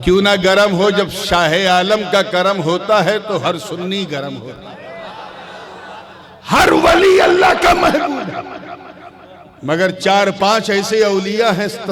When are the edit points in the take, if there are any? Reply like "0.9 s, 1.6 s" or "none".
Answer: 6.2 s